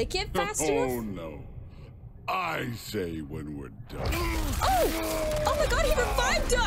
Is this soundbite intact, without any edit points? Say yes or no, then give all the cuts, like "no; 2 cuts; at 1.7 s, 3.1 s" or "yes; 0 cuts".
yes; 0 cuts